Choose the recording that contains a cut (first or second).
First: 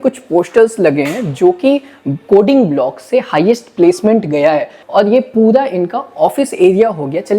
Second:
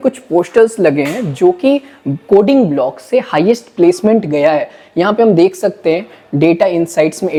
first